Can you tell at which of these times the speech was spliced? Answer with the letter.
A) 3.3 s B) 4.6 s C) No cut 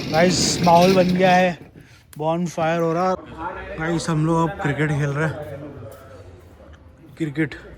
A